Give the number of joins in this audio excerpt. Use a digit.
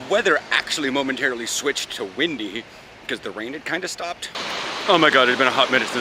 1